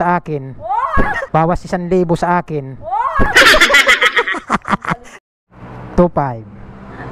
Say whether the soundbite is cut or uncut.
cut